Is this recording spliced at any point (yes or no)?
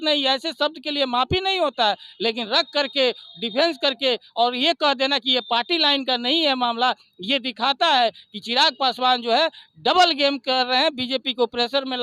no